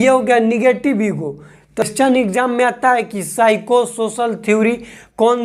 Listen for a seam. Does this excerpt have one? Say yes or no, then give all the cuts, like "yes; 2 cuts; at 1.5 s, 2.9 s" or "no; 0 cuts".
yes; 1 cut; at 1.8 s